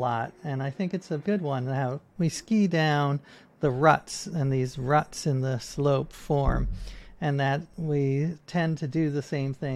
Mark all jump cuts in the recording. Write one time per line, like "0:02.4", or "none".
0:01.2
0:02.0
0:07.7